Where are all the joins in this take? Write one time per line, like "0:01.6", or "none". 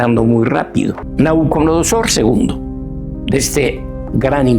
0:01.0